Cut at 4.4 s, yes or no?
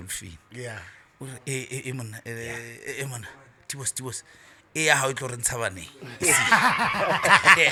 no